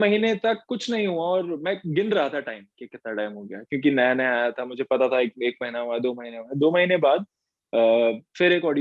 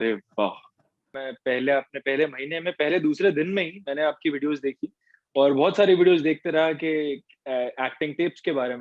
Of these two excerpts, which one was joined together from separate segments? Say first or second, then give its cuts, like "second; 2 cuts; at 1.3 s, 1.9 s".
second; 1 cut; at 1.2 s